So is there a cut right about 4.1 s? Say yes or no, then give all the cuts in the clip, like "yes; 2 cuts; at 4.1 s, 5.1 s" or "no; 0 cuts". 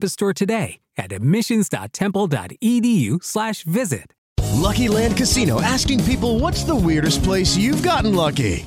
yes; 1 cut; at 4.1 s